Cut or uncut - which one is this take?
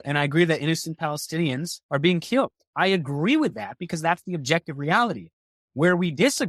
cut